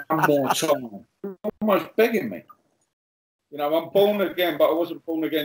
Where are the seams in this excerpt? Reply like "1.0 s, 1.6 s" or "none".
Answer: 3.2 s

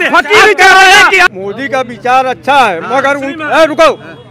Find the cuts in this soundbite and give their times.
1.3 s

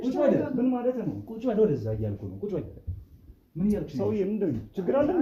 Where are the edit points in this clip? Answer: none

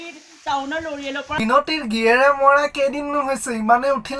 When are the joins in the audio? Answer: 1.4 s

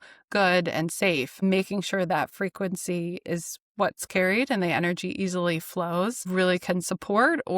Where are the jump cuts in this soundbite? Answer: 1.4 s, 6.2 s

